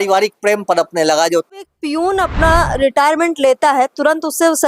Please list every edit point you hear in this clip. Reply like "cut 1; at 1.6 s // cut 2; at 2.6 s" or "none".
cut 1; at 1.6 s